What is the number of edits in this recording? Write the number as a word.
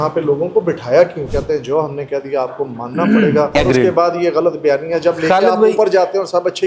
two